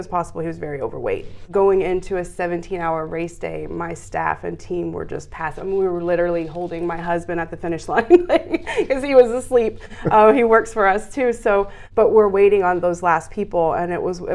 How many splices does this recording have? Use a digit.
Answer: 2